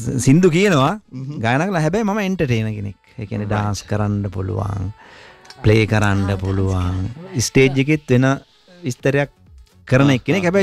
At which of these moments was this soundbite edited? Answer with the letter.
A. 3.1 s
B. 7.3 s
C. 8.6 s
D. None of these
D